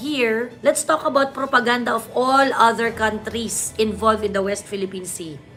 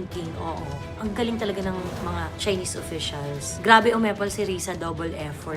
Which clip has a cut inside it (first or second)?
second